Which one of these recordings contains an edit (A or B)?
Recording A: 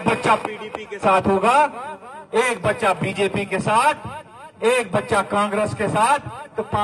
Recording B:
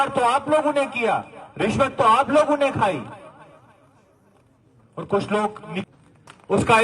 B